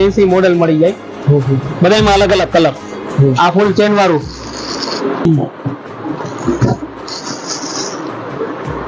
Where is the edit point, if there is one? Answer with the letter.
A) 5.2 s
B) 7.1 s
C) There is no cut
A